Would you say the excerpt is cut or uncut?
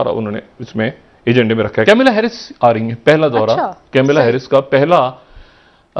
cut